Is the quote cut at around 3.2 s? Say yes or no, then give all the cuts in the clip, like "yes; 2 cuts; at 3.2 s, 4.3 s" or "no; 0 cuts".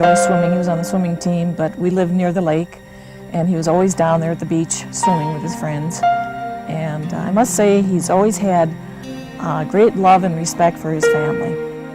yes; 1 cut; at 3.2 s